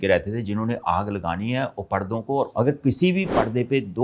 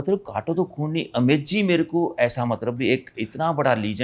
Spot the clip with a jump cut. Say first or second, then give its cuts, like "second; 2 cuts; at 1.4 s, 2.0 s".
first; 2 cuts; at 2.5 s, 3.3 s